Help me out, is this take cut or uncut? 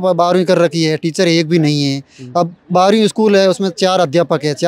uncut